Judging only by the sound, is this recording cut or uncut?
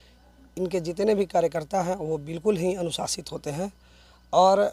uncut